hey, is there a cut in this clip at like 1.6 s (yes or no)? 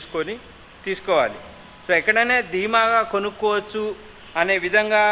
no